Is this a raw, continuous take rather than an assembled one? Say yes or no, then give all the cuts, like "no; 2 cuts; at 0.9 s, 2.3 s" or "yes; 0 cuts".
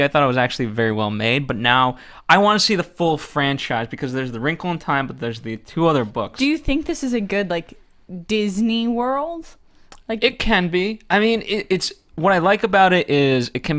no; 1 cut; at 11.5 s